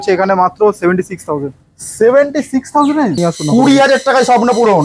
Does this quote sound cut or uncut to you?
cut